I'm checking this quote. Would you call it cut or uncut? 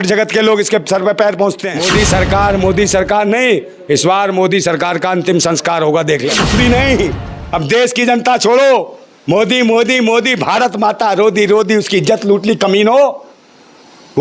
cut